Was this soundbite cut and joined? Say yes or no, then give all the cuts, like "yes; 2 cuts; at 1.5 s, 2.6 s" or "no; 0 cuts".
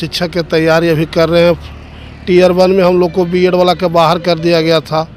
no; 0 cuts